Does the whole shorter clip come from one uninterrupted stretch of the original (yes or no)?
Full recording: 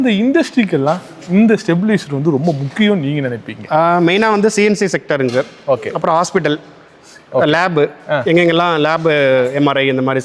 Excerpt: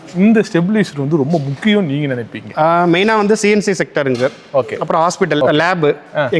no